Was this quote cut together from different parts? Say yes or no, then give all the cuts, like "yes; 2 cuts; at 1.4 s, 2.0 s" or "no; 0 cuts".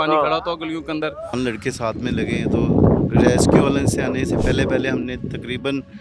yes; 1 cut; at 1.3 s